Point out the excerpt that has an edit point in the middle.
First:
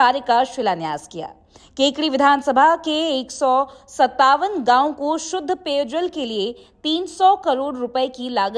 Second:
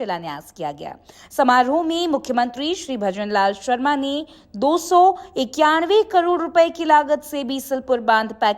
second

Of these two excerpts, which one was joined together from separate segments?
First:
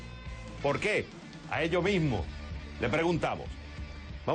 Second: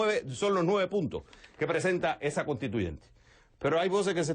second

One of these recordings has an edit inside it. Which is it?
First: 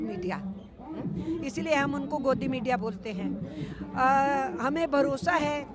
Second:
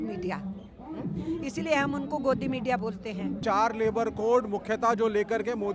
second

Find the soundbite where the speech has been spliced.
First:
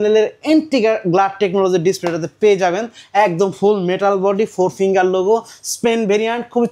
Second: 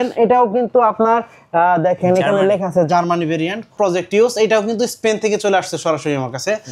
second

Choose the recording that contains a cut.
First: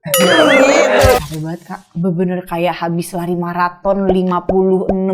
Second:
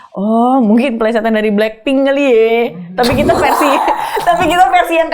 first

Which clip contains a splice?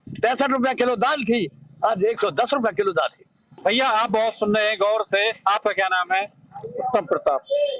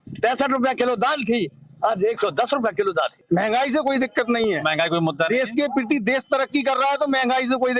second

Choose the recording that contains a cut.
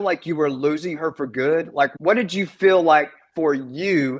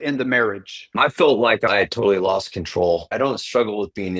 second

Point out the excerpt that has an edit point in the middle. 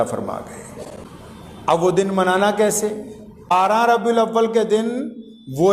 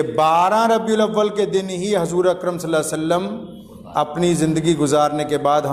first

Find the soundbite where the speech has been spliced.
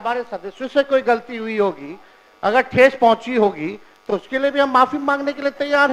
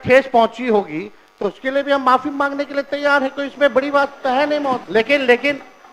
second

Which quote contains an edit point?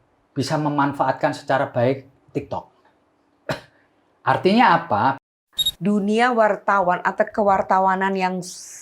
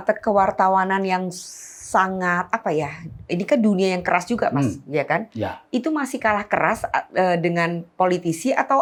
first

